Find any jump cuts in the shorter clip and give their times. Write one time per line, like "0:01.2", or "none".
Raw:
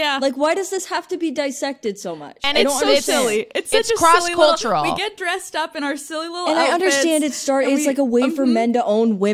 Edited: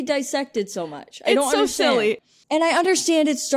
0:02.3